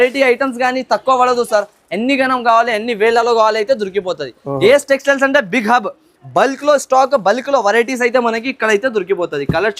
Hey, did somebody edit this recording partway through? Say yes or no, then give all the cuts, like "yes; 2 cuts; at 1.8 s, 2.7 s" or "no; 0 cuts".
no; 0 cuts